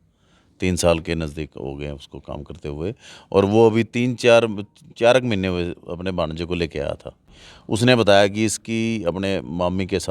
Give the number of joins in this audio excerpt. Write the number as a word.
one